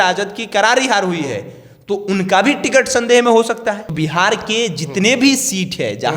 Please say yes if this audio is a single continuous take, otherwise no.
no